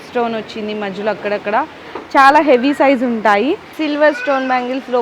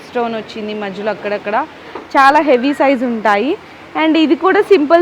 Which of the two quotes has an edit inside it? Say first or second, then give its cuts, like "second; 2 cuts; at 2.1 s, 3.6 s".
first; 1 cut; at 3.7 s